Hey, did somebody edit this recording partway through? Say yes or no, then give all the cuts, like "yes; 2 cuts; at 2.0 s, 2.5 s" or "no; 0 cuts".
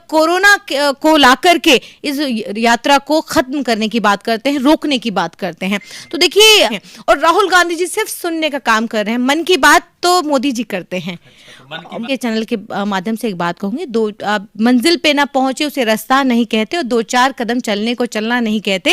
yes; 2 cuts; at 6.7 s, 12.0 s